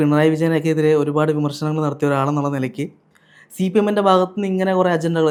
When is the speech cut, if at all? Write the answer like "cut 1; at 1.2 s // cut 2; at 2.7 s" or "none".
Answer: none